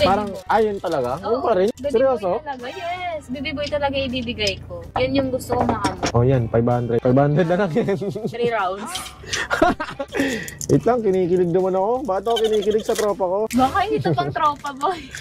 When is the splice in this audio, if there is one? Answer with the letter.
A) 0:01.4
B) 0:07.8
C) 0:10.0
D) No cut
C